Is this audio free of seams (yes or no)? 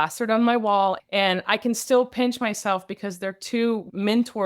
no